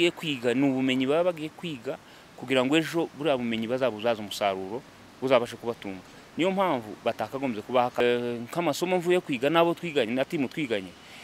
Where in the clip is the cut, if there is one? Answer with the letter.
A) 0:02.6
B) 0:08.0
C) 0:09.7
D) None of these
B